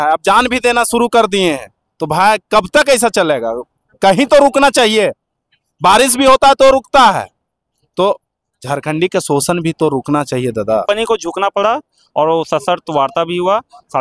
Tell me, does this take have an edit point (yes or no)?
yes